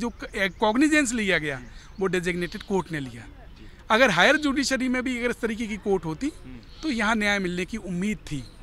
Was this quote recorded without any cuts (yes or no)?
yes